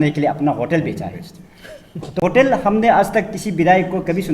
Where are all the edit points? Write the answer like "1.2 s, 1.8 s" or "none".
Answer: 2.2 s